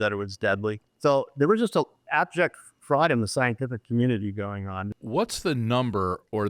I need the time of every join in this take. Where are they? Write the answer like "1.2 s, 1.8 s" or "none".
4.9 s